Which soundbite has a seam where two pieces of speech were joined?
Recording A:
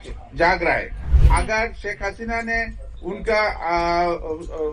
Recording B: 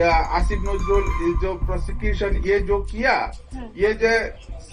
A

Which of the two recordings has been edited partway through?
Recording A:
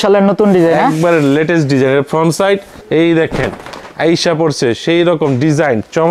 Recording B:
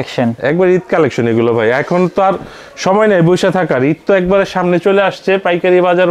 A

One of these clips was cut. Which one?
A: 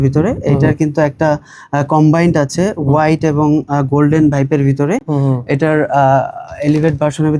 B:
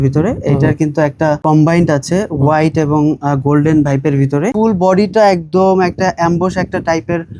B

